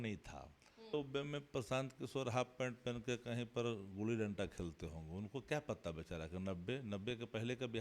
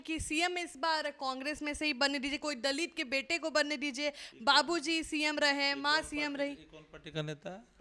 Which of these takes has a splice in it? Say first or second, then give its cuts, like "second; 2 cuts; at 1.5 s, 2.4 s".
first; 1 cut; at 0.9 s